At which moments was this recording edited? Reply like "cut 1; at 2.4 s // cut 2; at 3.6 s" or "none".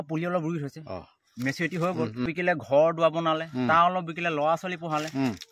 cut 1; at 2.3 s